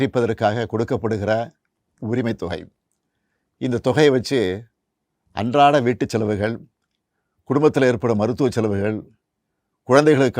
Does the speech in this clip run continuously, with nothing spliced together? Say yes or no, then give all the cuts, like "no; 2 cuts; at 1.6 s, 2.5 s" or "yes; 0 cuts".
yes; 0 cuts